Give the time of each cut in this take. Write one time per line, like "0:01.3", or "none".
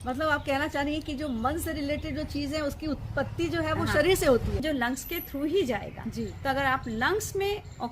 0:04.5